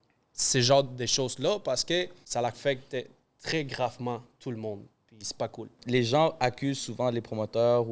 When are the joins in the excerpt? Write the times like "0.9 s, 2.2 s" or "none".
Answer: 2.2 s, 5.8 s